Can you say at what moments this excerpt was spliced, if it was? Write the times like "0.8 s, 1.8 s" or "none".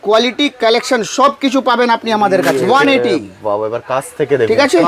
2.5 s